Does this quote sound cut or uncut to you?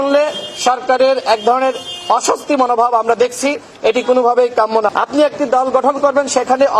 cut